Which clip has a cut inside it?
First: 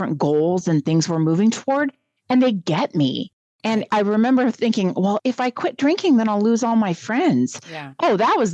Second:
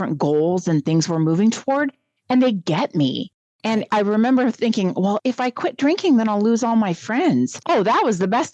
second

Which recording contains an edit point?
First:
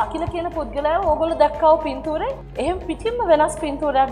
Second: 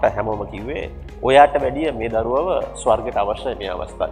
first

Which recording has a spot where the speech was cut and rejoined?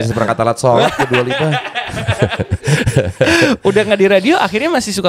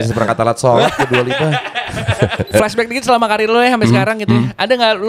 second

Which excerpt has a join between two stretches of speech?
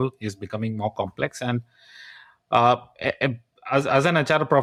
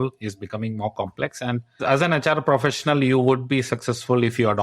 second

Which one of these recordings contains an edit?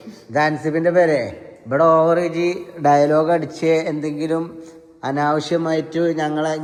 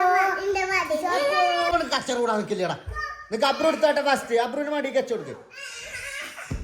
second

